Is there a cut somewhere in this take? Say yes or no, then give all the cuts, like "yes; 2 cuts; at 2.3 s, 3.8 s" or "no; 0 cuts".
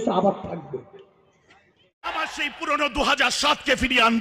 yes; 1 cut; at 2.1 s